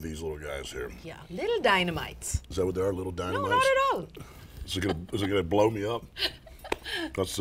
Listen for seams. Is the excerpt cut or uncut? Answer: uncut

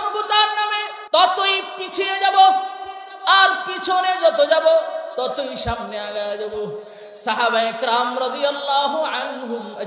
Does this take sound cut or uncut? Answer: cut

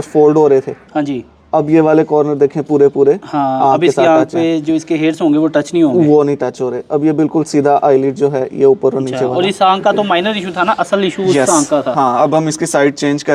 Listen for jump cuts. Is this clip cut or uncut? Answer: uncut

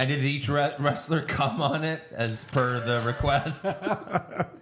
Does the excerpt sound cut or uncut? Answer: uncut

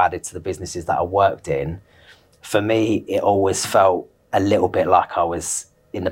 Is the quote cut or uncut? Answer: uncut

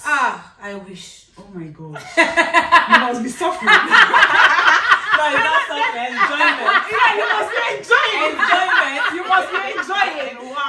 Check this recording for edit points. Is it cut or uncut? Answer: uncut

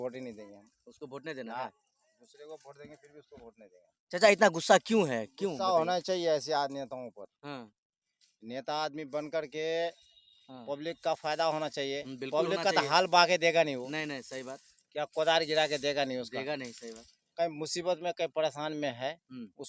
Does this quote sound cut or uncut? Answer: uncut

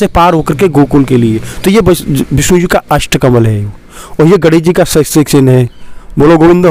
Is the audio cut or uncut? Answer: uncut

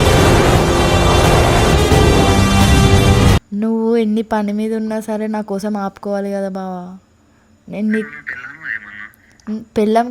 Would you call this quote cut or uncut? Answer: cut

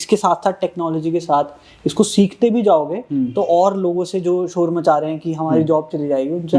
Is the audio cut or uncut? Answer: uncut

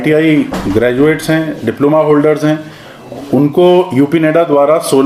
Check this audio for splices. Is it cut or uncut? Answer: uncut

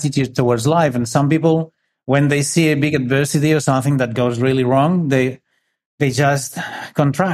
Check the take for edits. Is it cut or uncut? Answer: uncut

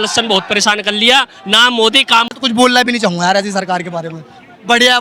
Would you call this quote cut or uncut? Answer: cut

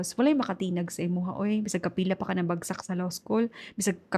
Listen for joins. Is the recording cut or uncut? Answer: uncut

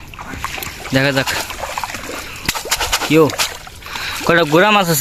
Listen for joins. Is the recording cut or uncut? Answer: uncut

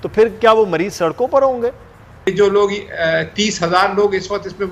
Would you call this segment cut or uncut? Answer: cut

